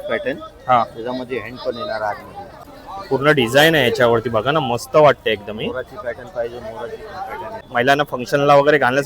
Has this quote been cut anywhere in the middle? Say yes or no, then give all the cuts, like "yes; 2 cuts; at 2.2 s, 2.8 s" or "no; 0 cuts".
yes; 2 cuts; at 2.6 s, 7.7 s